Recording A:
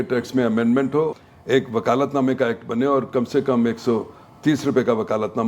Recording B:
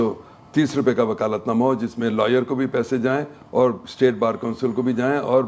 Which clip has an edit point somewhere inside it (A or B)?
A